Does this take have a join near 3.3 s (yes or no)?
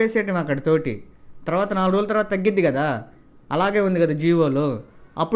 no